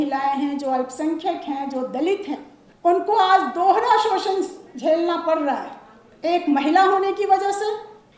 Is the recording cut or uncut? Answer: uncut